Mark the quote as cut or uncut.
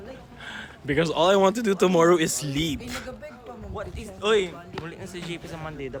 uncut